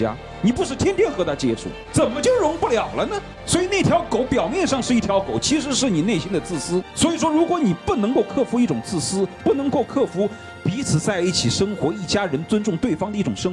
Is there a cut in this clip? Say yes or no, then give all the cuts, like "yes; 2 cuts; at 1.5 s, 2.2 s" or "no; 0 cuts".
no; 0 cuts